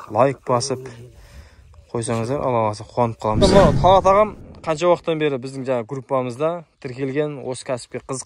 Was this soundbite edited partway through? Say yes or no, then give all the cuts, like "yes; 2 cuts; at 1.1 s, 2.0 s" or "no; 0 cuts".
yes; 1 cut; at 3.4 s